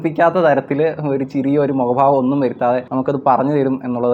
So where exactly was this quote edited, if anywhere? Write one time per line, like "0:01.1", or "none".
none